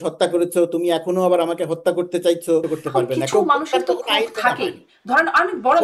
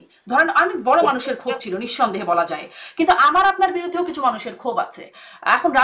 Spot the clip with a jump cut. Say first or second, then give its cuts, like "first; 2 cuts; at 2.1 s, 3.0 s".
first; 1 cut; at 2.7 s